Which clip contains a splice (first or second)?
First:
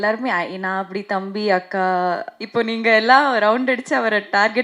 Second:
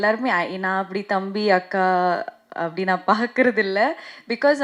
first